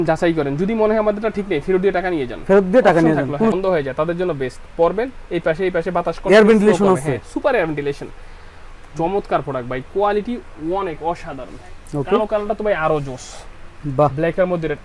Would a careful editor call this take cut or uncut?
uncut